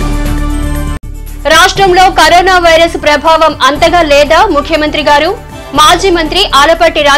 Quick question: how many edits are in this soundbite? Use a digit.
1